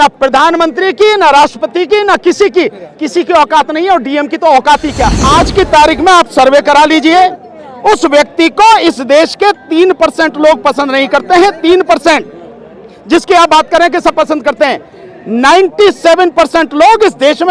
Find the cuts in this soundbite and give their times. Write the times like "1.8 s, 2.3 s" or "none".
5.2 s